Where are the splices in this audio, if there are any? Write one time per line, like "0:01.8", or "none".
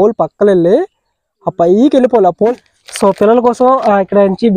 0:02.6